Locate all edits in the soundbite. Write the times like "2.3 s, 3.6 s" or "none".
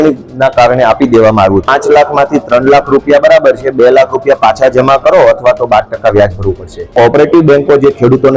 1.7 s, 6.9 s